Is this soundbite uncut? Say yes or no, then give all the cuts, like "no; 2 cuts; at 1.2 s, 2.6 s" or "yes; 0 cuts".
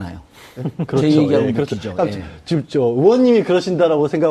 yes; 0 cuts